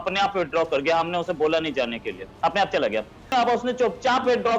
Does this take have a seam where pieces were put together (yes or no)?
yes